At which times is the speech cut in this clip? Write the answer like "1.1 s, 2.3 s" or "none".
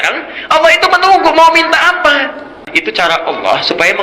2.7 s

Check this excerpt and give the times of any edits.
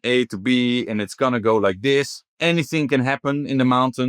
2.2 s

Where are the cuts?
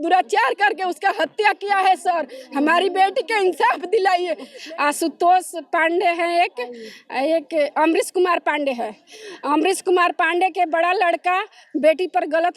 4.5 s

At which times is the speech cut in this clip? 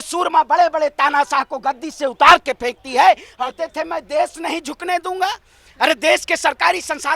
3.3 s

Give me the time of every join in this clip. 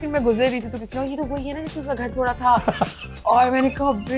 none

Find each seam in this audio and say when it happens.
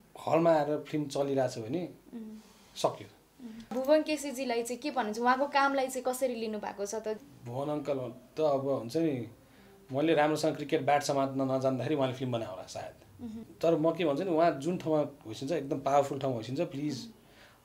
3.7 s, 7.2 s, 13.5 s

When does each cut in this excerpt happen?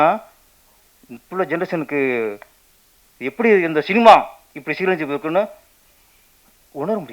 none

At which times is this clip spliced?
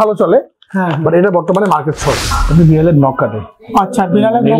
2.3 s

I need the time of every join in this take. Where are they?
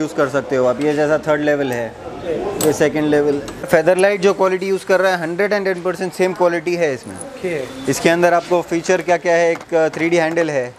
3.7 s

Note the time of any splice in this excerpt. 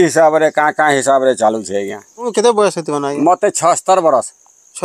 2.3 s

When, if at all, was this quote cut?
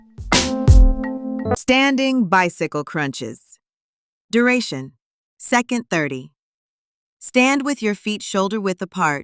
1.5 s

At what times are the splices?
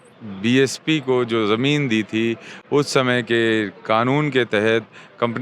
none

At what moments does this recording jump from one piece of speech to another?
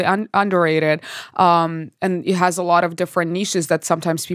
none

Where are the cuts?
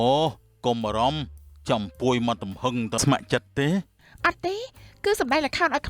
3.0 s

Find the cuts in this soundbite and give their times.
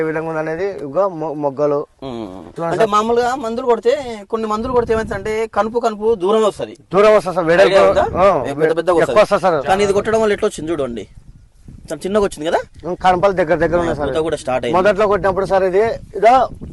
none

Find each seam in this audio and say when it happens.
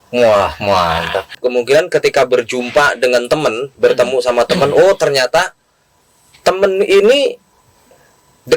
1.4 s

